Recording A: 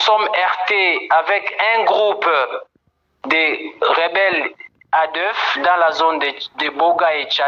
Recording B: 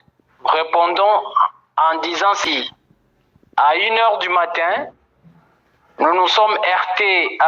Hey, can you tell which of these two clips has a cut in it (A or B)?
B